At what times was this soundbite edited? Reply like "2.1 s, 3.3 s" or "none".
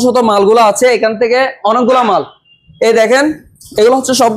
none